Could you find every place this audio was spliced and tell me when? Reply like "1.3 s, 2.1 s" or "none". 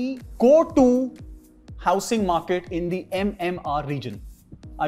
none